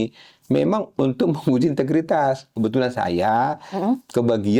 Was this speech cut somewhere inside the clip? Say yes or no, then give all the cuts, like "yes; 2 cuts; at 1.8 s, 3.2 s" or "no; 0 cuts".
yes; 1 cut; at 2.5 s